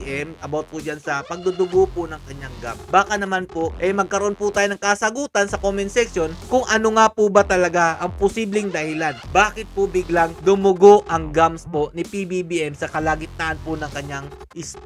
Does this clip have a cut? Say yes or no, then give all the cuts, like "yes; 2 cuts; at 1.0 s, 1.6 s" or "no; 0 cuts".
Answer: no; 0 cuts